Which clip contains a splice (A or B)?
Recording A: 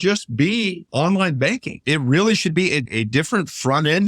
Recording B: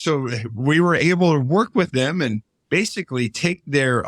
A